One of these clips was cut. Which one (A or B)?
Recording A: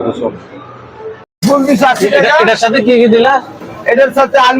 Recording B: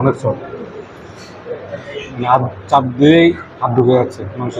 A